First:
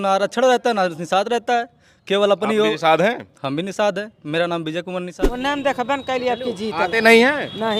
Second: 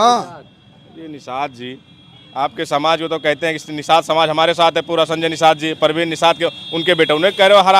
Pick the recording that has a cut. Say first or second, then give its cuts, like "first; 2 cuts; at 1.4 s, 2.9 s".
first; 1 cut; at 5.1 s